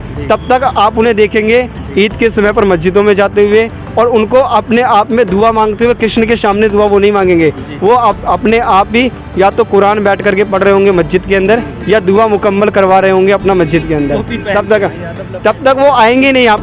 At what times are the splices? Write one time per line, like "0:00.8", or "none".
none